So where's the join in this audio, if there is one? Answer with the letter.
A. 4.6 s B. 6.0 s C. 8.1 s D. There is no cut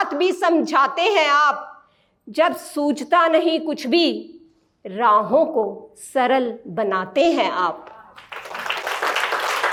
D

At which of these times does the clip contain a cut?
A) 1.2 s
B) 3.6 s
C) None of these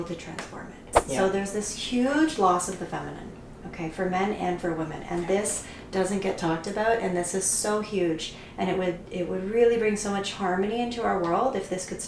A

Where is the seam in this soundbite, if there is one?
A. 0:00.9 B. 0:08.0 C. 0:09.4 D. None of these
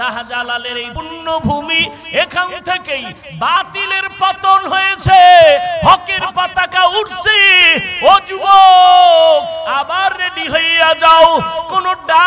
A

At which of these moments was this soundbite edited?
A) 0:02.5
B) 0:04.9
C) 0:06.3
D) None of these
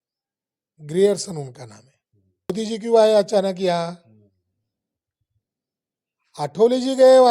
A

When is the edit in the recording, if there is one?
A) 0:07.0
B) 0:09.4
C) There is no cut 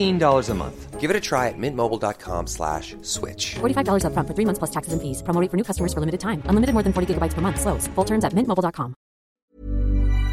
B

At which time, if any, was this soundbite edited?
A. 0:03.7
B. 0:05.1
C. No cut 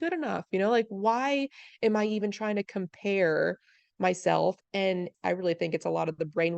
B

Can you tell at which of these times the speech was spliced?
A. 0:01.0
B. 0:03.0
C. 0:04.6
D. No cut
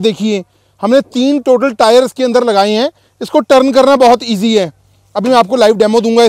D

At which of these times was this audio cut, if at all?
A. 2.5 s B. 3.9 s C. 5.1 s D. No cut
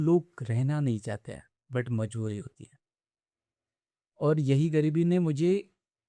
D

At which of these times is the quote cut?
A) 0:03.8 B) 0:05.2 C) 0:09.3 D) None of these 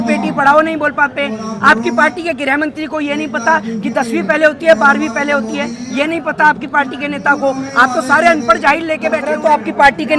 C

